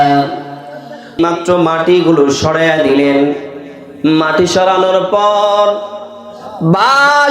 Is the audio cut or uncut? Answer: cut